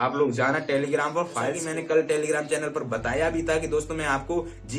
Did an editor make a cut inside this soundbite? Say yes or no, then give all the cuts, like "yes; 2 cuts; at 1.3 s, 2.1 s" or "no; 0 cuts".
yes; 1 cut; at 1.6 s